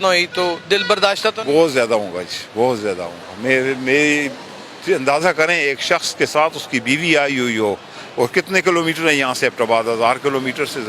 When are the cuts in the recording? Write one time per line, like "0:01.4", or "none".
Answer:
none